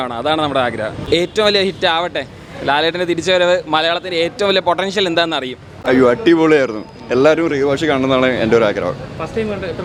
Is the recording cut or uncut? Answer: uncut